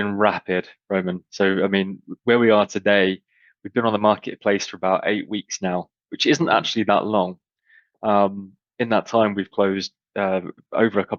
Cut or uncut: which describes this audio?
uncut